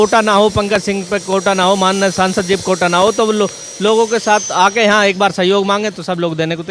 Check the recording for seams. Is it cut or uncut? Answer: uncut